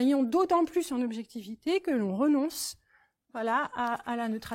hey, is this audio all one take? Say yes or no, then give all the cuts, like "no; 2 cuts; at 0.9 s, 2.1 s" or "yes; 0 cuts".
yes; 0 cuts